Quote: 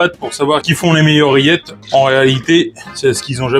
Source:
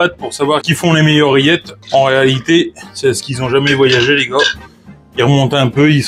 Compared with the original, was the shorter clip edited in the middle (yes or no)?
no